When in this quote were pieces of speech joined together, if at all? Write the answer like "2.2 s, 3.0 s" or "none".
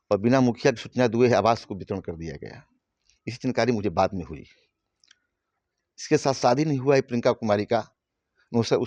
none